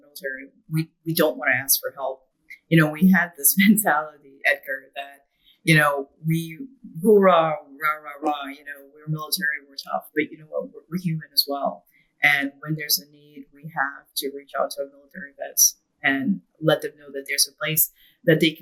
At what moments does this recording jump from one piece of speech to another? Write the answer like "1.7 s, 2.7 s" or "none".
none